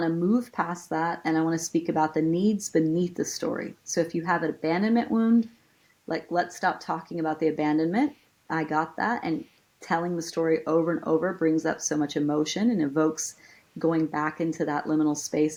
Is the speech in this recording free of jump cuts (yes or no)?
yes